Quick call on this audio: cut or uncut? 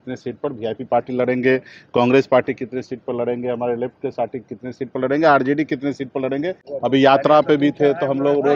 cut